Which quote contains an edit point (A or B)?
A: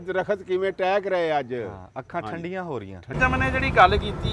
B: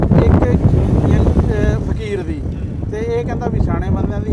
A